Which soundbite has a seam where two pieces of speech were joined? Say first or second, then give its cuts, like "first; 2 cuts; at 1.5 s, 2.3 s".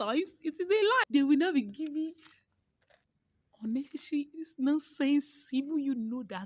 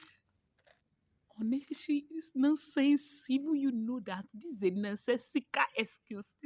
first; 1 cut; at 1.1 s